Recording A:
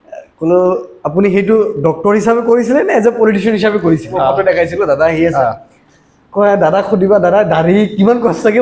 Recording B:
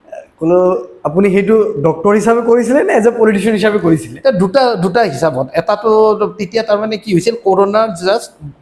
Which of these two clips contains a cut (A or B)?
A